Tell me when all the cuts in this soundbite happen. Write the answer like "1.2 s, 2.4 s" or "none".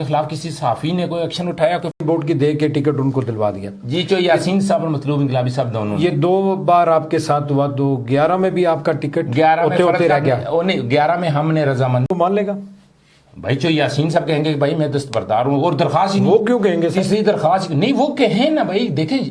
2.0 s, 12.1 s